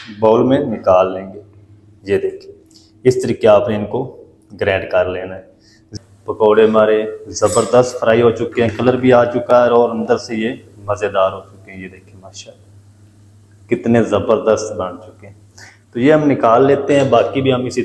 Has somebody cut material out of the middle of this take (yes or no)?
yes